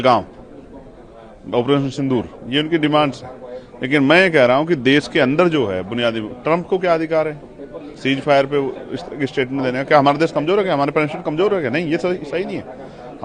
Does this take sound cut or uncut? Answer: uncut